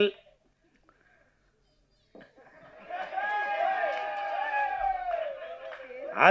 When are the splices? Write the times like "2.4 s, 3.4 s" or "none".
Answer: none